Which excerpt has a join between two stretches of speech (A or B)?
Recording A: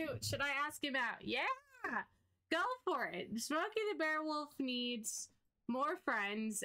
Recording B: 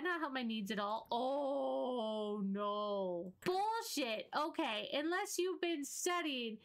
B